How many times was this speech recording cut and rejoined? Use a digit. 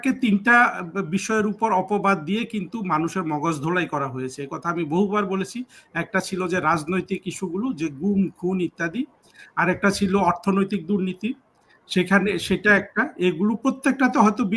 0